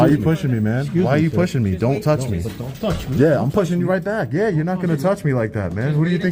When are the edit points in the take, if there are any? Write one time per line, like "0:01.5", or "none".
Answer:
none